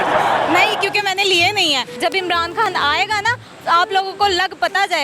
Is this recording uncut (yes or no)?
no